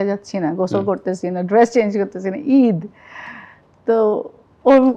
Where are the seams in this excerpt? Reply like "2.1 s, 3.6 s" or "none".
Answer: none